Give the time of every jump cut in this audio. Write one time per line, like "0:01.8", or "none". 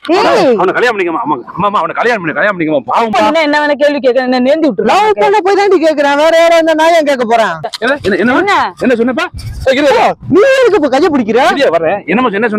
0:03.1
0:07.7